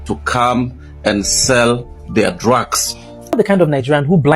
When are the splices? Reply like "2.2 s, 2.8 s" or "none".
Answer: 3.4 s